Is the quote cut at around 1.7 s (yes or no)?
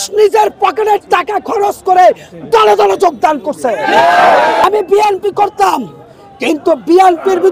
no